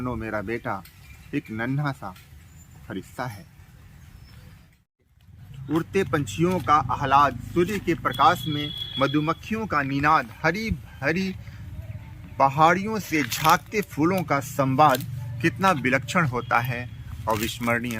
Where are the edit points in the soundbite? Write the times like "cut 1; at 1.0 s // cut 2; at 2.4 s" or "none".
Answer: cut 1; at 5.1 s